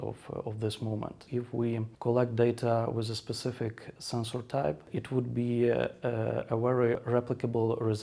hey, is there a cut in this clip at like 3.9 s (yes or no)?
no